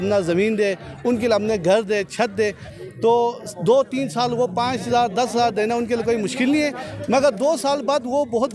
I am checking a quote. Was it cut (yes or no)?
no